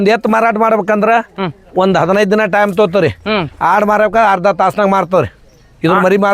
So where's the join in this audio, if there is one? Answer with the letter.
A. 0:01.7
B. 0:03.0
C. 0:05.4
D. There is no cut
D